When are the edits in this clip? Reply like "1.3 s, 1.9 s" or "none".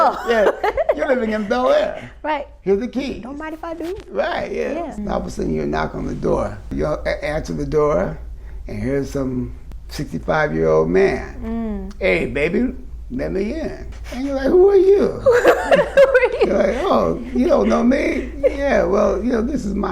5.0 s, 6.7 s

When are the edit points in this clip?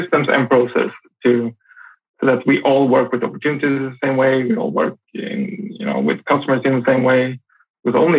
none

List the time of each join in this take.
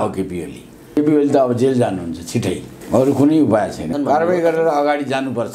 1.0 s, 2.7 s, 3.9 s

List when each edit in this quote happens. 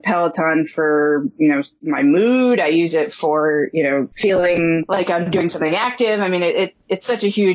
4.1 s, 4.9 s

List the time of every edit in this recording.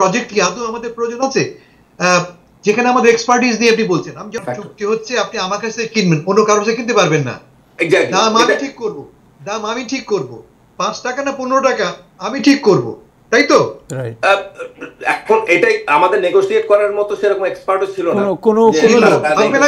4.4 s

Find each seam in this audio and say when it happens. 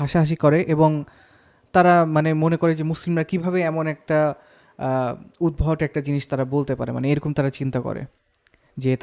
none

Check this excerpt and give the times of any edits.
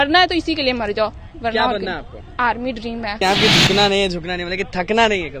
3.2 s

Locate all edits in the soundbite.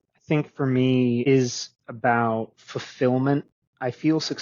1.2 s

